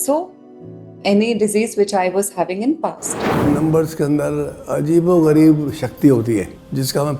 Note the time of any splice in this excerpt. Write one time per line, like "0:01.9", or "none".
0:03.5